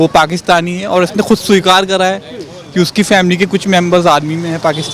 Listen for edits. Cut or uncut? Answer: uncut